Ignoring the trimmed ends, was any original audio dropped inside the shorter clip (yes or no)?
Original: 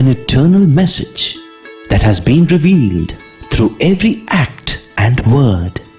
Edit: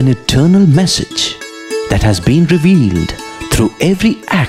no